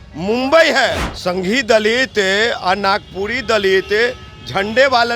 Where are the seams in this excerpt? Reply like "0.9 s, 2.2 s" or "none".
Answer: 1.1 s

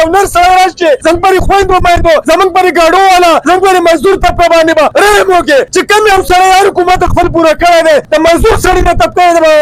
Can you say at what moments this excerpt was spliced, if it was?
1.0 s, 2.2 s, 3.4 s, 4.9 s, 5.7 s, 8.1 s

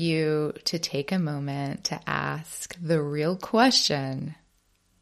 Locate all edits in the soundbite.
none

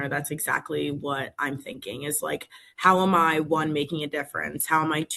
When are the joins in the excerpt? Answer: none

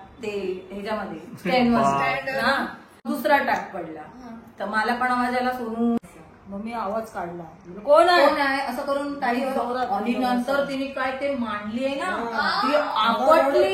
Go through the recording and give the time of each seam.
3.0 s, 6.0 s

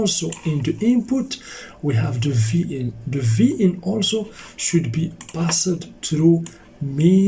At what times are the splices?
none

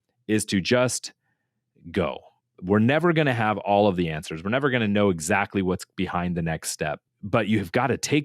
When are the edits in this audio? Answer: 7.1 s

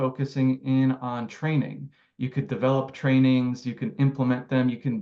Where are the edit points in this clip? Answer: none

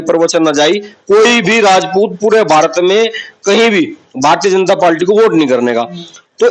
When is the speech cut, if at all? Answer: none

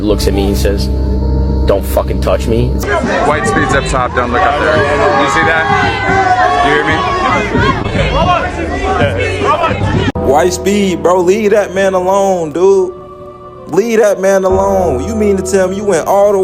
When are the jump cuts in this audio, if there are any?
2.8 s, 10.1 s

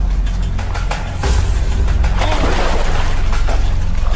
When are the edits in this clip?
none

